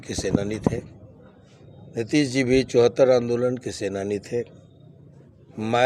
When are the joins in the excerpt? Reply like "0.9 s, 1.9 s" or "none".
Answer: none